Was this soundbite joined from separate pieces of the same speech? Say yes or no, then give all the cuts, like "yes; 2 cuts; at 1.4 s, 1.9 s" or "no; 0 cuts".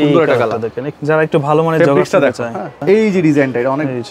yes; 2 cuts; at 1.0 s, 2.7 s